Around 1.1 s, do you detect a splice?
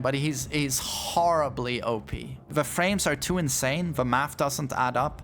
no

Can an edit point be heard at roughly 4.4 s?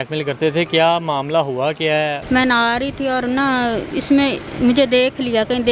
no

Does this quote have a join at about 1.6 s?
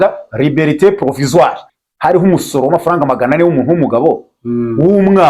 yes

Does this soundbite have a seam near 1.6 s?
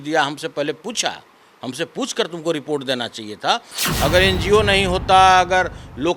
no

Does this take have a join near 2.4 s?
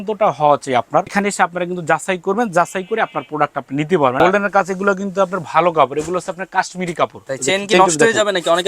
no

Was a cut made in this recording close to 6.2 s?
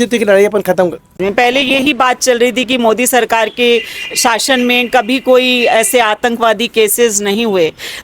no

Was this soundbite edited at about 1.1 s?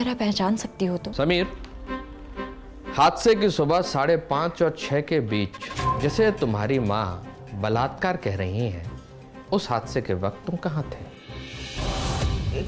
yes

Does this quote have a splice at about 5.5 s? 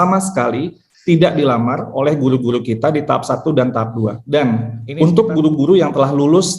no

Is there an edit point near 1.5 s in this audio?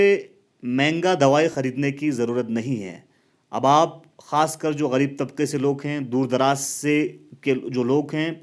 yes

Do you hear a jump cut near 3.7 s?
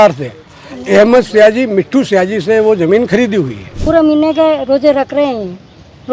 yes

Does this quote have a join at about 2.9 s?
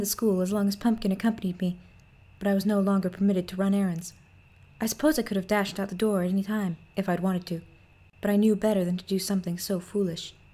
no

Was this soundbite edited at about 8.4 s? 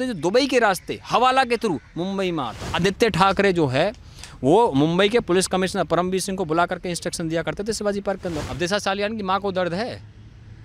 yes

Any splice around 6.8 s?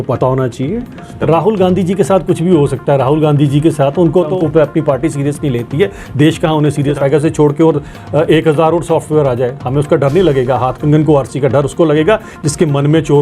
yes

